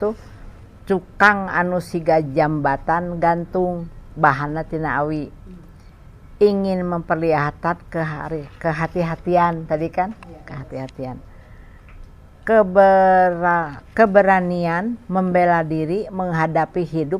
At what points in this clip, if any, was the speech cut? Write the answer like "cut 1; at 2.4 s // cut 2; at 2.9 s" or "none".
none